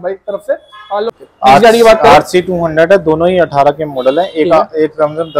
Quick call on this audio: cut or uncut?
cut